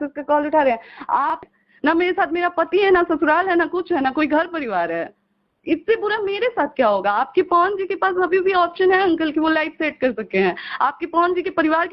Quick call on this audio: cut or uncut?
cut